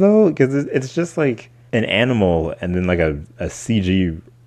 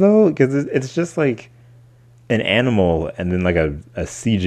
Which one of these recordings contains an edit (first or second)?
first